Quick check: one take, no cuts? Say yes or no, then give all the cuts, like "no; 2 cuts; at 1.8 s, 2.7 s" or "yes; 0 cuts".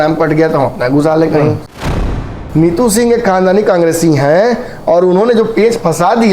no; 1 cut; at 2.2 s